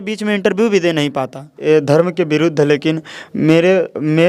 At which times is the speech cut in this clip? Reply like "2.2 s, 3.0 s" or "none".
1.5 s